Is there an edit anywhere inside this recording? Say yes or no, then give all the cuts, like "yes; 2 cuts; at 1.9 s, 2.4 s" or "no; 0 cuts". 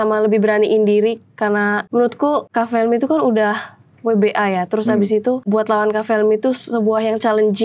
yes; 2 cuts; at 2.2 s, 5.4 s